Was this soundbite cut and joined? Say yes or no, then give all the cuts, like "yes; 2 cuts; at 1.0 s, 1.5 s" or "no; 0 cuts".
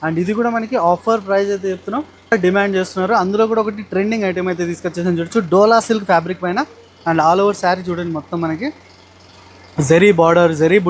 yes; 1 cut; at 2.3 s